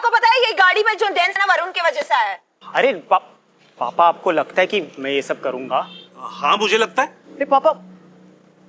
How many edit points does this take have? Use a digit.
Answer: 1